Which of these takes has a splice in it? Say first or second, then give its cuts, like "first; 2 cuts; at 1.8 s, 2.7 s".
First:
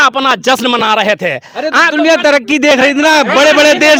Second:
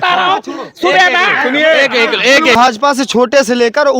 second; 1 cut; at 2.6 s